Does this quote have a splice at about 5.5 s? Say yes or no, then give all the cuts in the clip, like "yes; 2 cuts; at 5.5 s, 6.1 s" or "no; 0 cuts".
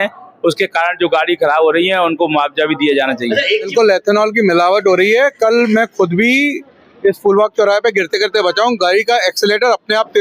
no; 1 cut; at 3.7 s